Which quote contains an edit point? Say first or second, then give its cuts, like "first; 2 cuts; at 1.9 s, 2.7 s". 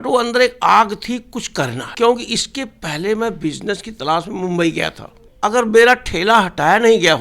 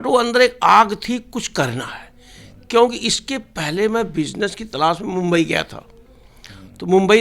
first; 2 cuts; at 1.8 s, 5.3 s